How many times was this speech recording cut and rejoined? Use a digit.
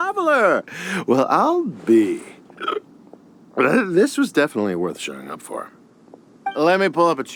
0